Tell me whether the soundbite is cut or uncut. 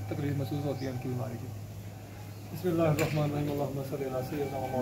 uncut